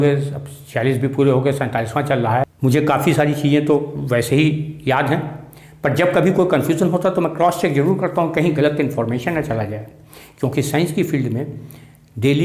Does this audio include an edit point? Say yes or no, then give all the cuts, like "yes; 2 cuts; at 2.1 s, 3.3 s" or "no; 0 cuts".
yes; 1 cut; at 2.5 s